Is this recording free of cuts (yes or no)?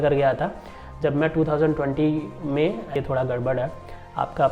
no